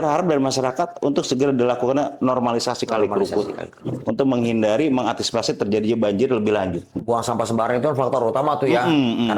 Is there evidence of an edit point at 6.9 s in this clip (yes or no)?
yes